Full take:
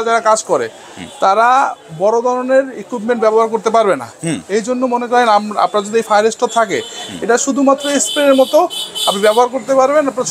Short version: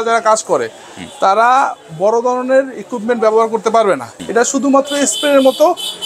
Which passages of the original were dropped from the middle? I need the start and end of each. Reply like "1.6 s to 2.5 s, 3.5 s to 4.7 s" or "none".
4.1 s to 7.1 s